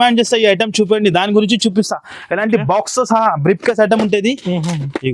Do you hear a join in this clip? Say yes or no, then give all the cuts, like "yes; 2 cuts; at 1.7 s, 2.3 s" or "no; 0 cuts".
no; 0 cuts